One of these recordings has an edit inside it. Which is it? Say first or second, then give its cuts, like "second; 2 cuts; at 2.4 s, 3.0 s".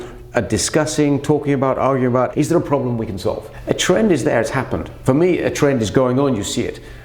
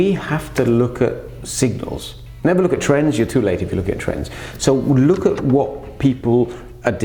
first; 3 cuts; at 2.3 s, 3.5 s, 4.8 s